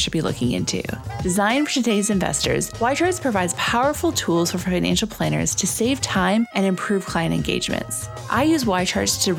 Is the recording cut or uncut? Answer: uncut